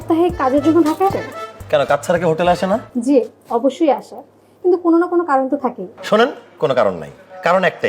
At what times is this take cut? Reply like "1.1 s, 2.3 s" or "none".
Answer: 1.2 s, 2.9 s